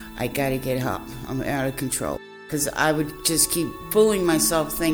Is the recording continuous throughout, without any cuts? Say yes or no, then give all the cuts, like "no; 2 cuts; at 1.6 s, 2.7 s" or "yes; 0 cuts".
no; 2 cuts; at 2.5 s, 3.8 s